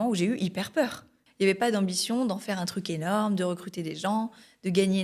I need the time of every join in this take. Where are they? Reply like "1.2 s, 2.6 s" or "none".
1.2 s